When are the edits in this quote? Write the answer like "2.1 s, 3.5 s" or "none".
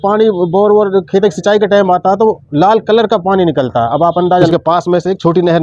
4.5 s